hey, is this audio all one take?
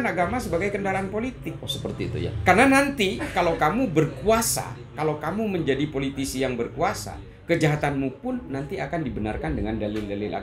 yes; 0 cuts

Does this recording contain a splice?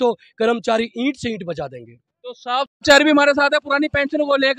no; 0 cuts

